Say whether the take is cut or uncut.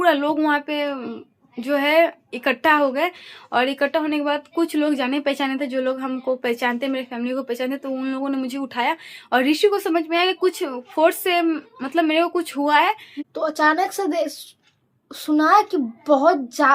uncut